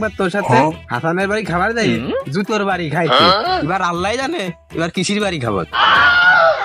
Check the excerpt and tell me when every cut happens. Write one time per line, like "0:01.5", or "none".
none